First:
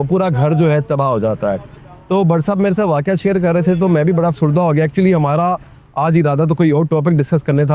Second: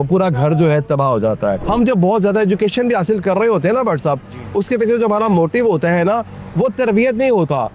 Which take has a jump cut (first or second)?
second